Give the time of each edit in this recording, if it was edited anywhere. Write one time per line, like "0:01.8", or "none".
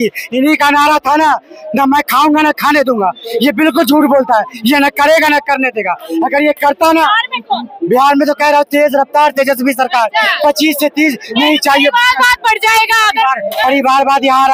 none